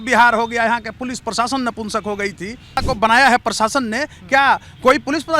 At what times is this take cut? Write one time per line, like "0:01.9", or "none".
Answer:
0:02.8